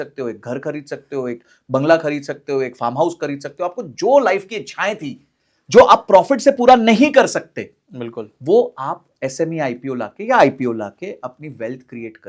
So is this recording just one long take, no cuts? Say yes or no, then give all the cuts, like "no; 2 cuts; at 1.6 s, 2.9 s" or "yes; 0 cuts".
yes; 0 cuts